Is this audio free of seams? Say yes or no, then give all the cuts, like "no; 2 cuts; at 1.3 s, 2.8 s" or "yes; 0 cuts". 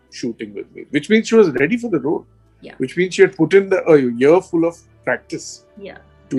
yes; 0 cuts